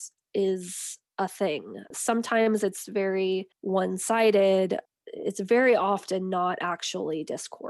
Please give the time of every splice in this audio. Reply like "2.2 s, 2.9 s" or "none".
3.5 s